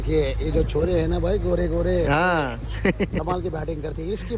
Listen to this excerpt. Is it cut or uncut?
uncut